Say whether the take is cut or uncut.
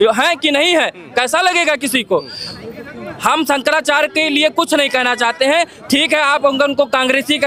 uncut